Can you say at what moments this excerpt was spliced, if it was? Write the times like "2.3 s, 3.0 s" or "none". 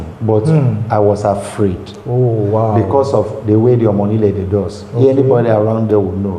none